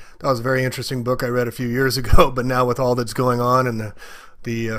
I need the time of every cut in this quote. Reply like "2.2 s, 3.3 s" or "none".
2.5 s